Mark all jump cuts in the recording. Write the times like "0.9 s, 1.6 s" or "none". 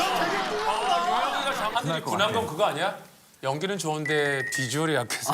1.7 s